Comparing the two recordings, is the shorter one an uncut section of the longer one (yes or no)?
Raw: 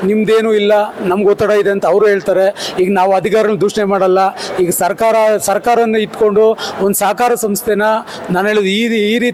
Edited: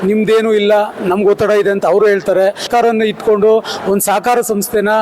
no